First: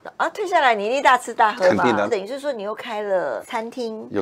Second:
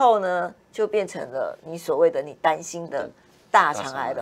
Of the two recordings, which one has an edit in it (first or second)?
first